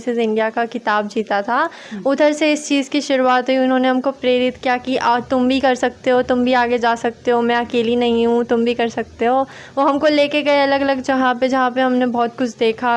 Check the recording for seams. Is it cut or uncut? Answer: uncut